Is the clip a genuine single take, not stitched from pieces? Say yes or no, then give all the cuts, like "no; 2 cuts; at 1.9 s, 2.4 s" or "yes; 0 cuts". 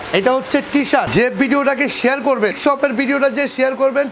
no; 2 cuts; at 1.1 s, 2.6 s